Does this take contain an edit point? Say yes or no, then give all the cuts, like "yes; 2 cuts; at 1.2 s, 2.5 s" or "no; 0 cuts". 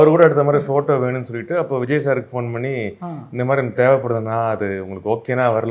no; 0 cuts